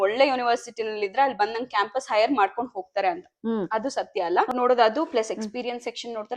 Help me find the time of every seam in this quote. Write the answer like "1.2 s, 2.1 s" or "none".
4.5 s